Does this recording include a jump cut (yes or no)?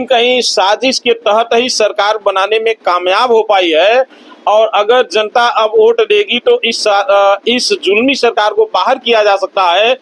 no